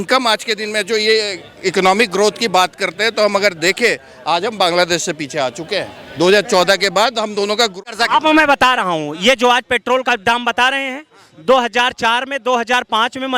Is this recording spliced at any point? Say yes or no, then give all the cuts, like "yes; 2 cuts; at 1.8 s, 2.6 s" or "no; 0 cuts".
yes; 1 cut; at 7.7 s